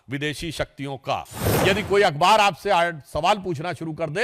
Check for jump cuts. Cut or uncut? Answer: cut